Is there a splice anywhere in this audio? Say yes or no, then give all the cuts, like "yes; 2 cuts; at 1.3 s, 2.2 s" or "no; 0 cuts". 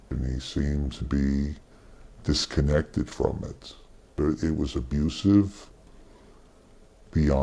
no; 0 cuts